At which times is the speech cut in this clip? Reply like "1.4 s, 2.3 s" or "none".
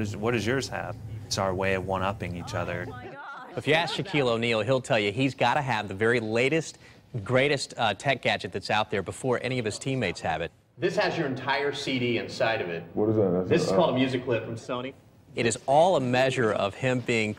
9.0 s

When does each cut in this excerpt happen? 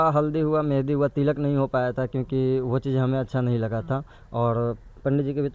none

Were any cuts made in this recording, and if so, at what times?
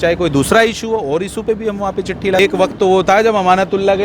2.4 s

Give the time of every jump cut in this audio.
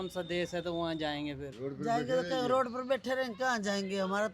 1.5 s

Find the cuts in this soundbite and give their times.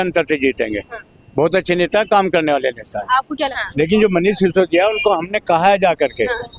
3.6 s

